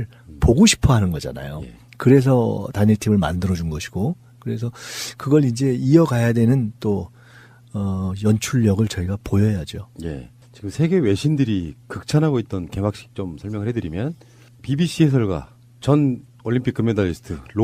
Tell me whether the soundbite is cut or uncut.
cut